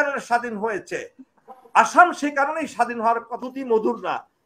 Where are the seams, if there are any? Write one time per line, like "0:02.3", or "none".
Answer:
0:03.3